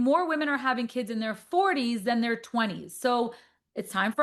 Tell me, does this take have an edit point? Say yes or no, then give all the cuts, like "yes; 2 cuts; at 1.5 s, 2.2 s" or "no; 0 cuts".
no; 0 cuts